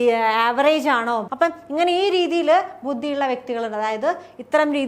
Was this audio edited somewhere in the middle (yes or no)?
yes